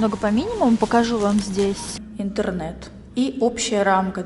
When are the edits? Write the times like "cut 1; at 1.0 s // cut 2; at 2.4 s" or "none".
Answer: cut 1; at 2.0 s

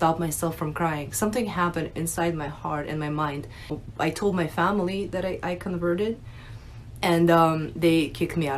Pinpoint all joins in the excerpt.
cut 1; at 3.8 s

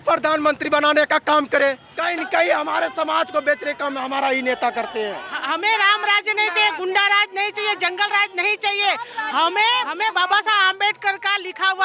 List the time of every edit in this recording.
cut 1; at 1.9 s // cut 2; at 5.3 s // cut 3; at 9.9 s

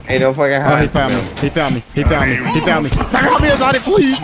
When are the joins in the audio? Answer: none

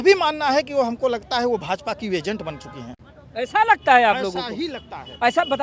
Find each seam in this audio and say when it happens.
none

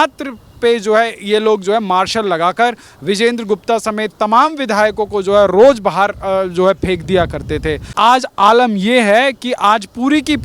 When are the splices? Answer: cut 1; at 7.8 s

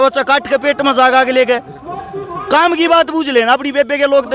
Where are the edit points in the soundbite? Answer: none

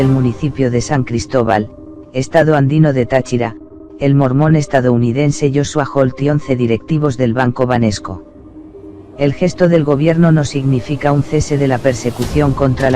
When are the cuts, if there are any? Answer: cut 1; at 4.7 s

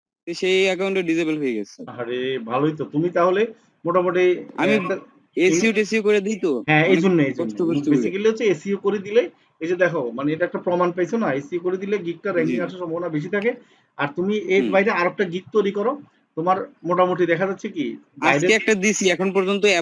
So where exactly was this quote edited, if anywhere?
none

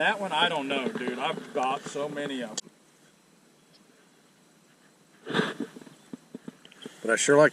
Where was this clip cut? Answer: cut 1; at 2.6 s

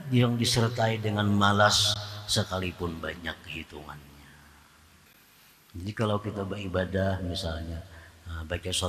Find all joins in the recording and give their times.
cut 1; at 5.1 s

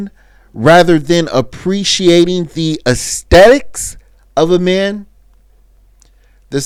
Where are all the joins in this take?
none

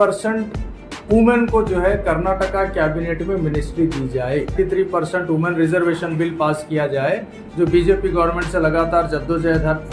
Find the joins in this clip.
cut 1; at 4.5 s

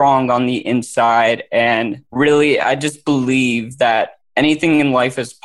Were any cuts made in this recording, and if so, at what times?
cut 1; at 2.0 s // cut 2; at 4.2 s

